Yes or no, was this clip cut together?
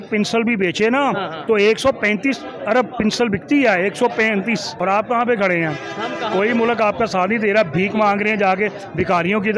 yes